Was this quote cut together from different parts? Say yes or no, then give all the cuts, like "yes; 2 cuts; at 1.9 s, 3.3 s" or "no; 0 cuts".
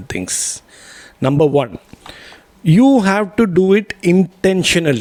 no; 0 cuts